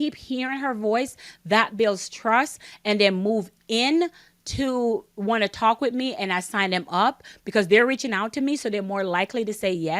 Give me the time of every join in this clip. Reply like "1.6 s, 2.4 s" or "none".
2.7 s